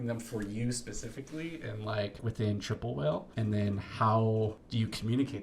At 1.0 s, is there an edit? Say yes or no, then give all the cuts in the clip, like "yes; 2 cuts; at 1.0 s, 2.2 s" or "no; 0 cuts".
no; 3 cuts; at 2.2 s, 3.3 s, 4.6 s